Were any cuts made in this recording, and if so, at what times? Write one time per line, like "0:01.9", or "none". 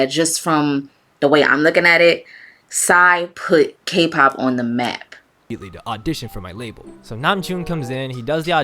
0:05.6